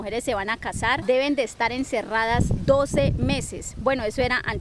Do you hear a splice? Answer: no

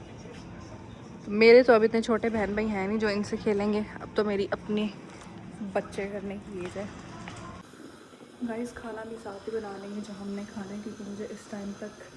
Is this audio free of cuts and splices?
no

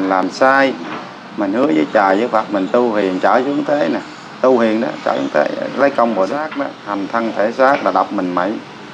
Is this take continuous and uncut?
no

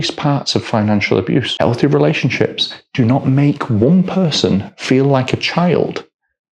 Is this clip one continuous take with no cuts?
no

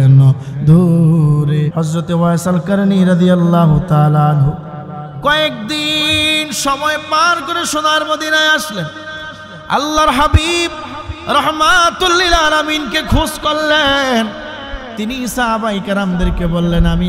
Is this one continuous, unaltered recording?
no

